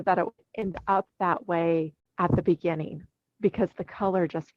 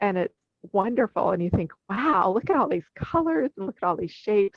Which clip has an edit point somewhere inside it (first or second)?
first